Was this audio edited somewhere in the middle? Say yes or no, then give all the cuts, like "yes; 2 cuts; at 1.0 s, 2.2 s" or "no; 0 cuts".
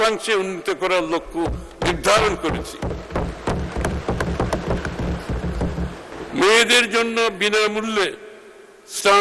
yes; 1 cut; at 6.1 s